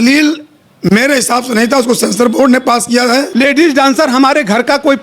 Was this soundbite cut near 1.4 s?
no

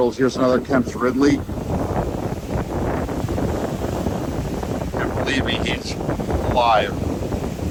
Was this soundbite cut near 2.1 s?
no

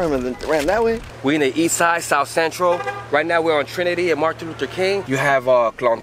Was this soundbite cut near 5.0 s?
yes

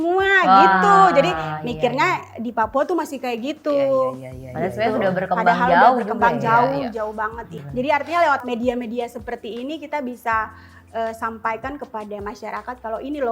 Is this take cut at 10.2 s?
no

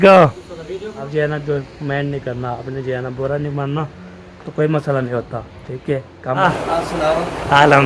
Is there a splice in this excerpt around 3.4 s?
no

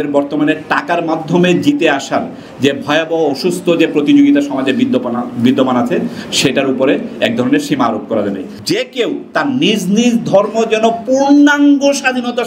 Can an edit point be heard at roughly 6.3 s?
no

